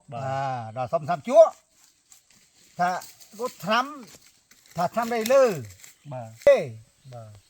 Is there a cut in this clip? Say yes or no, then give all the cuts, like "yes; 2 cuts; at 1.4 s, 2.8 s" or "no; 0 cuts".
yes; 1 cut; at 6.5 s